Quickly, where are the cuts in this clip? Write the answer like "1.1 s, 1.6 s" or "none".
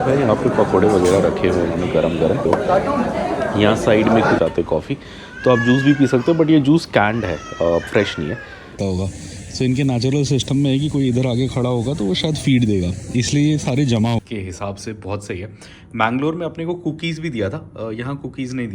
2.4 s, 4.4 s, 8.8 s, 14.2 s